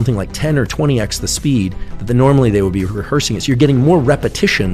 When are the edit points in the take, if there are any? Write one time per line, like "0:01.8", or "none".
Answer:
none